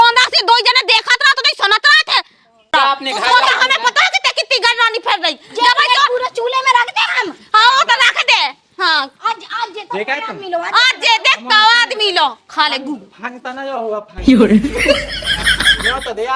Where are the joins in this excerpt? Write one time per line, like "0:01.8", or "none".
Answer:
0:02.7